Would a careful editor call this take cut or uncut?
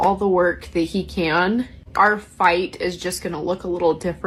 uncut